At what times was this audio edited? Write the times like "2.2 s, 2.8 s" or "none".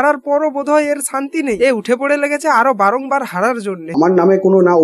3.8 s